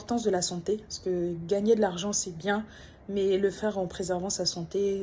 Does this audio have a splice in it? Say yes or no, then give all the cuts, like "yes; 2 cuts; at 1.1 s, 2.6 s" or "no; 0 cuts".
no; 0 cuts